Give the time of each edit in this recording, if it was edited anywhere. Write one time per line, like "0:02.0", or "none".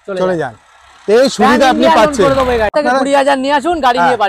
0:02.7

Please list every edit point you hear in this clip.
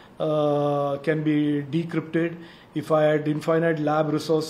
none

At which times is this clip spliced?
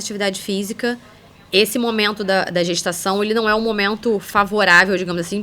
none

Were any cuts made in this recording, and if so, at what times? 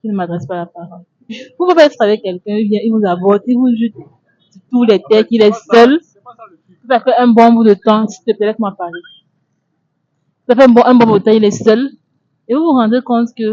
0:01.4

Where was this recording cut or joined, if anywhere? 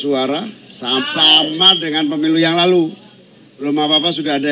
0:01.0

